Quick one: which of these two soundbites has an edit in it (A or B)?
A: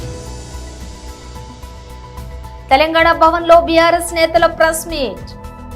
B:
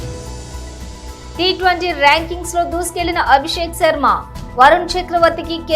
A